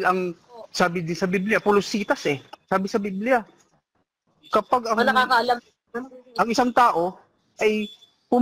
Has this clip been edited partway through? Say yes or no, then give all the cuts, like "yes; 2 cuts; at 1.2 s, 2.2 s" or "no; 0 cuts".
no; 0 cuts